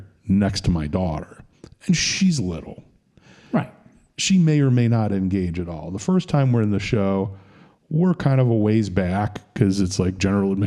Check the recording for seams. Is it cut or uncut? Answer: uncut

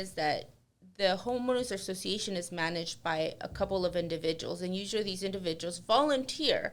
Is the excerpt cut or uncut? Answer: uncut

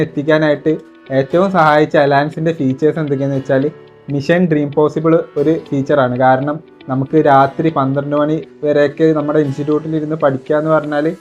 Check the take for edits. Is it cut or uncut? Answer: uncut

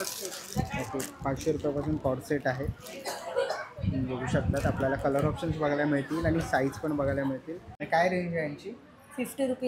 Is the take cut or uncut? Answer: cut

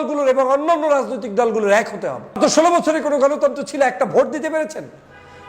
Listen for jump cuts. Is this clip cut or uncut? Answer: cut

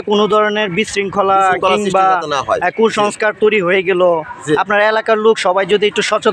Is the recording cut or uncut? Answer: uncut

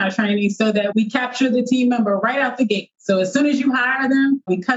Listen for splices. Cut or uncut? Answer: cut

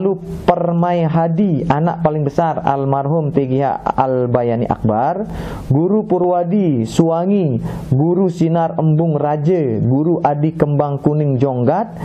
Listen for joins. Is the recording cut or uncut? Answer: uncut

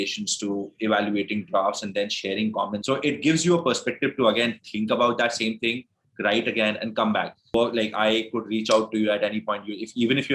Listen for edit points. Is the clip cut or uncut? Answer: cut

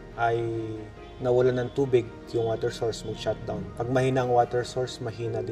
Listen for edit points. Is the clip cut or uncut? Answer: uncut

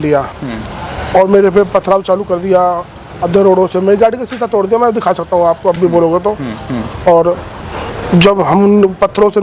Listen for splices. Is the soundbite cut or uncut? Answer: uncut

